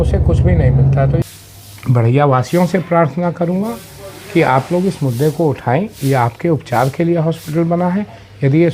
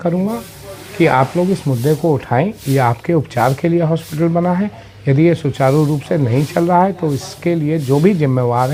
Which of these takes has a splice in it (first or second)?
first